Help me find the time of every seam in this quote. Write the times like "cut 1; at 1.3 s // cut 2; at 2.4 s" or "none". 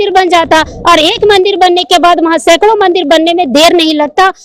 none